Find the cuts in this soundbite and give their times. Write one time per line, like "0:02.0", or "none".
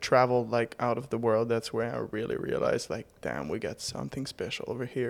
none

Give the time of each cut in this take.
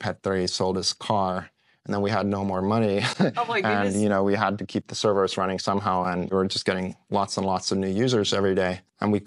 0:06.3

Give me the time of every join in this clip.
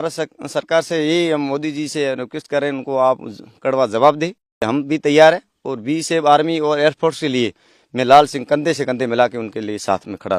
0:04.7

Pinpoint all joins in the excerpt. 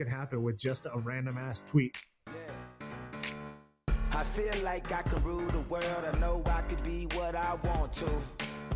0:02.0

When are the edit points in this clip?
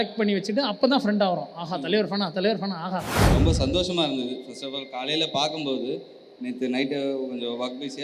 0:03.2

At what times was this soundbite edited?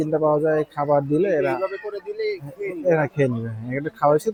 none

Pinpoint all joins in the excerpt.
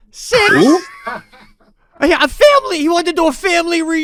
none

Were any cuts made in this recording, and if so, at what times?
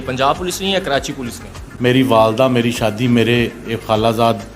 0:01.6

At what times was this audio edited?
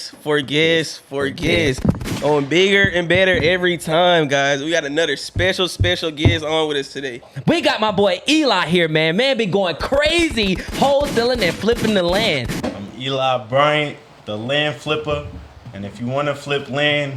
0:07.2
0:12.6

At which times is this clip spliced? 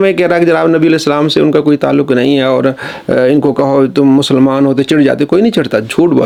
none

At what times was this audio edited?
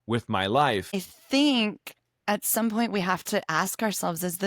0:01.1

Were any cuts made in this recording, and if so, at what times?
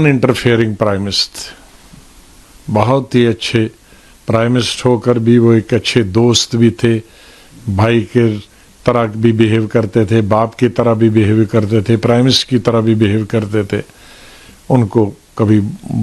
none

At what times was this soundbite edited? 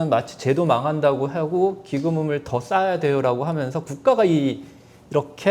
none

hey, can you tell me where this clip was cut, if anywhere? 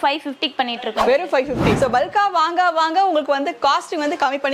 0:01.7

